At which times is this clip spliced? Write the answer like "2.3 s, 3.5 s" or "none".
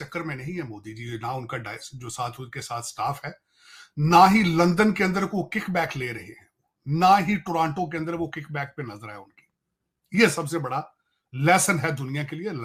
none